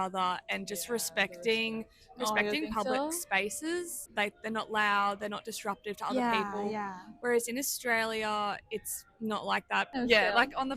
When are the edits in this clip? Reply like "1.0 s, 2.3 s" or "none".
4.0 s, 9.9 s